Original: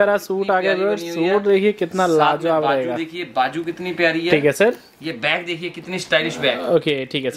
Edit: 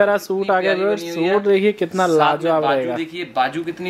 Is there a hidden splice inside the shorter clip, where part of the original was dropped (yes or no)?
no